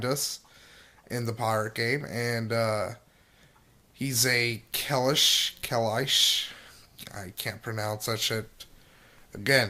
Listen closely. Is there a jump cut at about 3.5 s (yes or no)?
no